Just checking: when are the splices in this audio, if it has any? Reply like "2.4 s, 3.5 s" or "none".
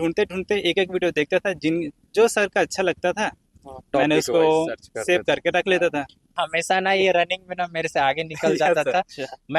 6.4 s